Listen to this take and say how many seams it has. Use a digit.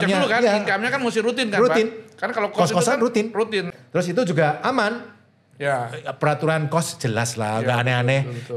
1